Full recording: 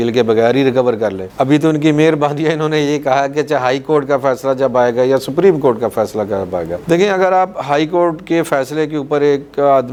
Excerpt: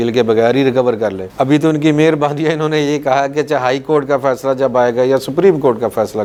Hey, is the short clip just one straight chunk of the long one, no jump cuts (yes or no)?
yes